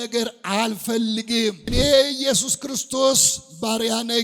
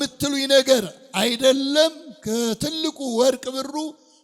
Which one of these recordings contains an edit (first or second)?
first